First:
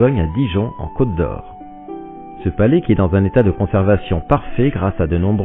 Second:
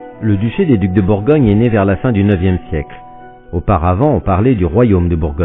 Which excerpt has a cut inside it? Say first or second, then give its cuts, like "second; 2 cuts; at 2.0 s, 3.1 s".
second; 1 cut; at 1.4 s